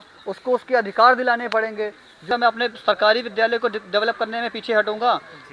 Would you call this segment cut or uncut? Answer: cut